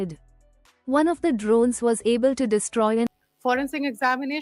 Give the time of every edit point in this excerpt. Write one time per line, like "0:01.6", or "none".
0:03.1